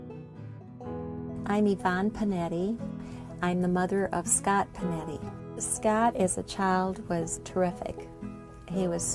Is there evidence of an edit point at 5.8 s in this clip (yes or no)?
no